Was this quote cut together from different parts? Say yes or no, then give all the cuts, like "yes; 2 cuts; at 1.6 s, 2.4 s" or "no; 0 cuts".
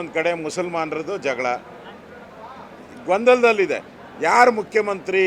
no; 0 cuts